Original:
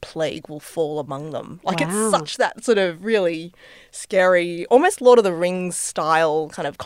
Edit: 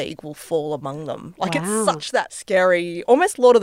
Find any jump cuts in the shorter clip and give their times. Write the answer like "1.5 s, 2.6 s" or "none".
2.3 s

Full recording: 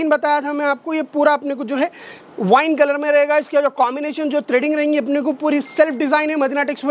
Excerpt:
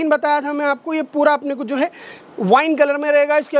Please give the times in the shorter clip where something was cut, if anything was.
none

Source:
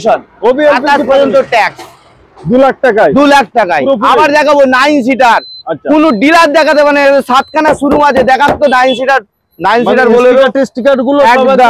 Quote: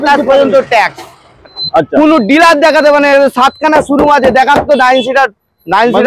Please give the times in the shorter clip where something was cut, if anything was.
1.6 s

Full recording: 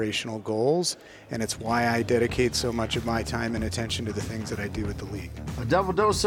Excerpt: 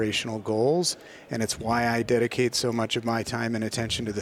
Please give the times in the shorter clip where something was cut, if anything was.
none

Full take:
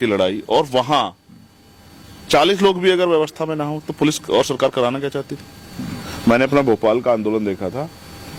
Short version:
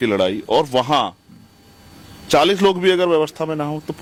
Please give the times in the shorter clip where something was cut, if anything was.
none

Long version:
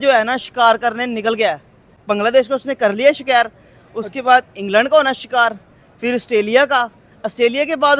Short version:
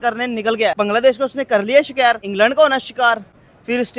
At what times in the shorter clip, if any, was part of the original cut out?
0.7 s, 2.3 s

